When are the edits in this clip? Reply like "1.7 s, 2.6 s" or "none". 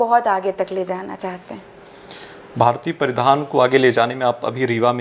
none